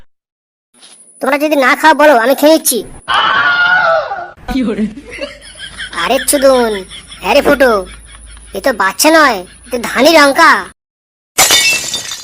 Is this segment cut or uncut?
cut